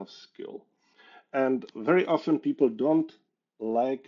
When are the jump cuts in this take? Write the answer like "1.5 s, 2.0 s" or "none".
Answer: 1.7 s